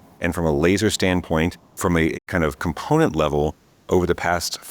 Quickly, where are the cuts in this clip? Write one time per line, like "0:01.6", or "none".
0:01.7